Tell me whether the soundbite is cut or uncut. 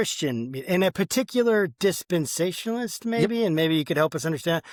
uncut